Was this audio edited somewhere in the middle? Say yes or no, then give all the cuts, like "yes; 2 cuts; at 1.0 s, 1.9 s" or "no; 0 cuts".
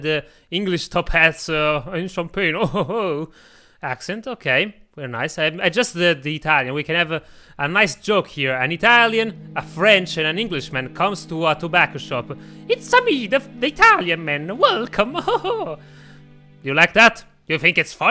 no; 0 cuts